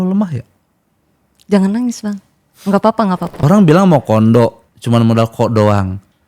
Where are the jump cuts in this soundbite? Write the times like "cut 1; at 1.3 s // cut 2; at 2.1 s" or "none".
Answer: cut 1; at 3.4 s // cut 2; at 4.7 s